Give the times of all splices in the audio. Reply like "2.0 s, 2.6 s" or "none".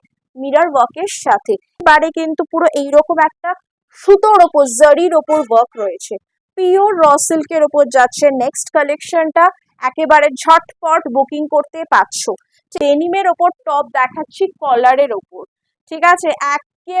1.8 s, 12.8 s